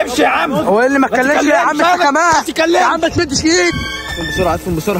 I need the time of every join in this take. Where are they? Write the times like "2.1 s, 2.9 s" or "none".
3.7 s

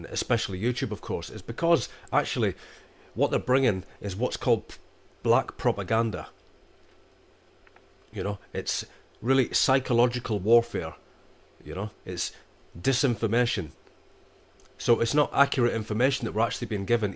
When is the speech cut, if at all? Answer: 13.2 s

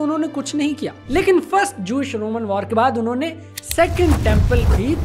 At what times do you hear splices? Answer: none

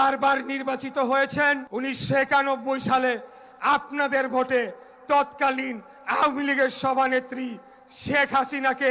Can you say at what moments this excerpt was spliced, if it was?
1.7 s

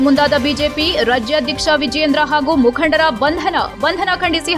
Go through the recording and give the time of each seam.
none

